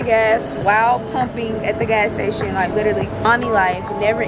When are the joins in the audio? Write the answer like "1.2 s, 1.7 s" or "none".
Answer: 3.2 s